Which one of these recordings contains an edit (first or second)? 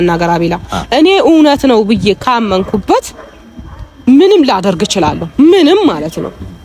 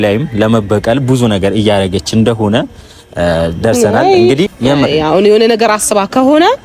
second